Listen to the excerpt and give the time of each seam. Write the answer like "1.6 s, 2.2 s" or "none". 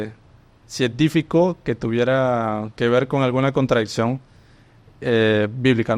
none